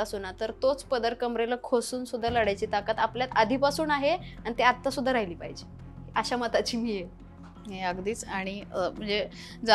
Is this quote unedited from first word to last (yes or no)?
yes